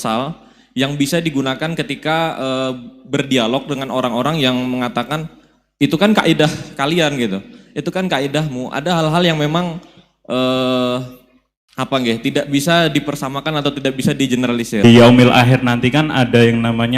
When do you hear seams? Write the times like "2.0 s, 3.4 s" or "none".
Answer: 14.8 s